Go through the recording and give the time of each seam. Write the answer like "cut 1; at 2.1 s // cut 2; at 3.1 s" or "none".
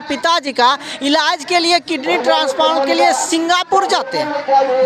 none